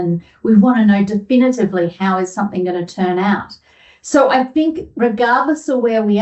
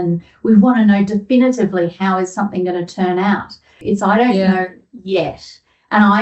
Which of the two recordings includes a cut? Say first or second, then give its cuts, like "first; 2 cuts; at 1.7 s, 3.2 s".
second; 1 cut; at 3.8 s